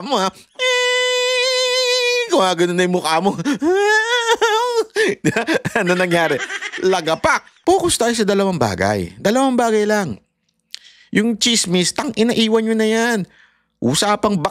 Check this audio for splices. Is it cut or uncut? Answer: cut